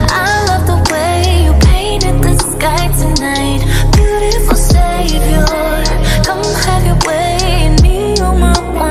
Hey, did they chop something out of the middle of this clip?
no; 0 cuts

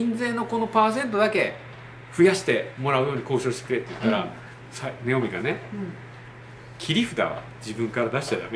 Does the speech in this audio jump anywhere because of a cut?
no; 0 cuts

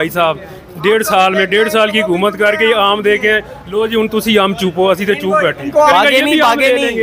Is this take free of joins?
no; 1 cut; at 5.9 s

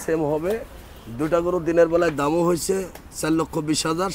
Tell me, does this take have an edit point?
no; 0 cuts

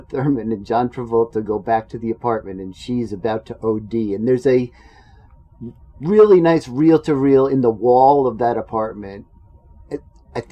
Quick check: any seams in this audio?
no; 0 cuts

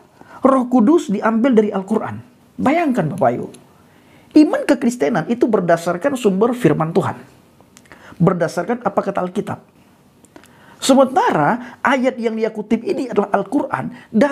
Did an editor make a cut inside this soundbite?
no; 0 cuts

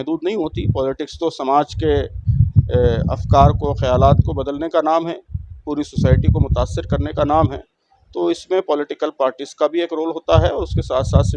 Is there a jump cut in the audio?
no; 0 cuts

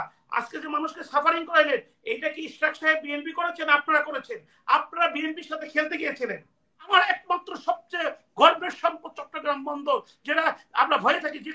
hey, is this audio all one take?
no; 1 cut; at 6.9 s

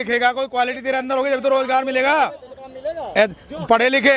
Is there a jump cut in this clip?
no; 0 cuts

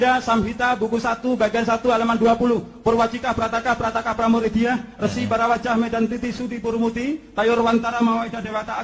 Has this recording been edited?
no; 0 cuts

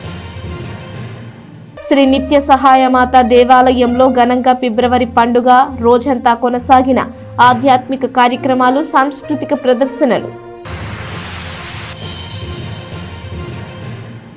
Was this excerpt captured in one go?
yes; 0 cuts

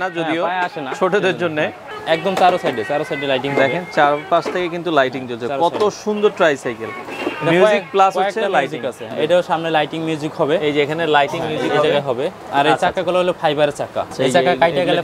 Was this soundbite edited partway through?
yes; 4 cuts; at 1.9 s, 9.1 s, 12.4 s, 14.1 s

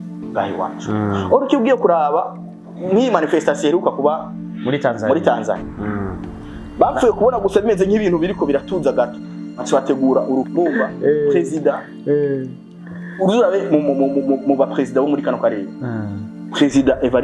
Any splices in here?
yes; 1 cut; at 10.5 s

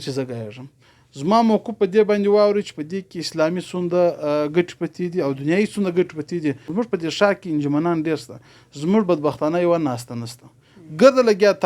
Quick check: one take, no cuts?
no; 1 cut; at 6.7 s

